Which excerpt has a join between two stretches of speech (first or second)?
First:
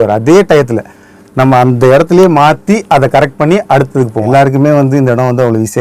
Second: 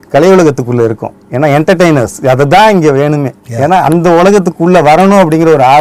first